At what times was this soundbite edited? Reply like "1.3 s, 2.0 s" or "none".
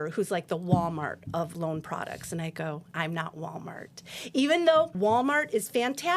1.5 s, 2.9 s, 4.9 s